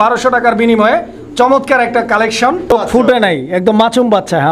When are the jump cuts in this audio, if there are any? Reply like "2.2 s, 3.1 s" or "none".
2.7 s